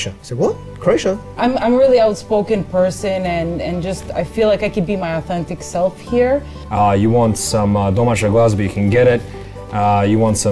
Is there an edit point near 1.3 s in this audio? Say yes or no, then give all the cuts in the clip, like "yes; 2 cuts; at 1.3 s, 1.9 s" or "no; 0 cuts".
yes; 2 cuts; at 1.3 s, 6.6 s